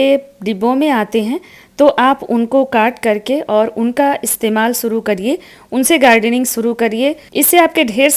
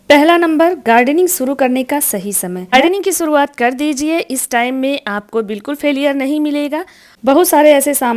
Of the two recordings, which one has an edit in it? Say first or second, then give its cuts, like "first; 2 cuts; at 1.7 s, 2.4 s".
second; 2 cuts; at 2.7 s, 7.1 s